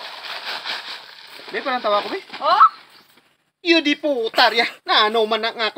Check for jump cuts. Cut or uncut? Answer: cut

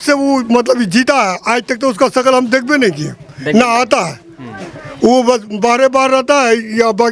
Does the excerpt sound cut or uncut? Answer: uncut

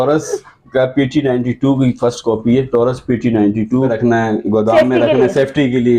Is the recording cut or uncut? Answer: cut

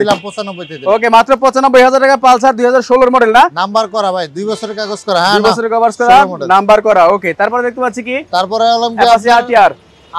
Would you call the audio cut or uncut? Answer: uncut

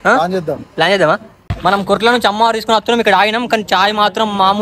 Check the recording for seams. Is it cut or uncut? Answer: cut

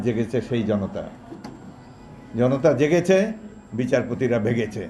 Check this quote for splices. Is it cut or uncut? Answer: uncut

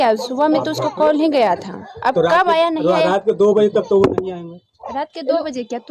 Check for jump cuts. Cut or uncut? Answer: uncut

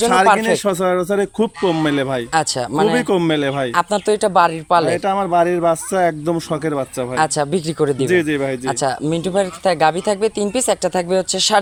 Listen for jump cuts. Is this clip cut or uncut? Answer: uncut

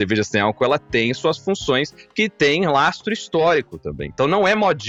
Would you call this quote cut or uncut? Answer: uncut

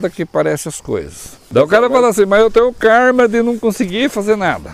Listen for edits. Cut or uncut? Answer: cut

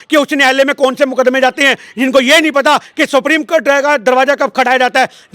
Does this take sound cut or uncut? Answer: uncut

